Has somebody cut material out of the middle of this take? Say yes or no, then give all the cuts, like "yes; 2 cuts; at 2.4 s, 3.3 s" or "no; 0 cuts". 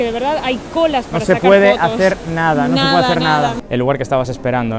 yes; 1 cut; at 3.6 s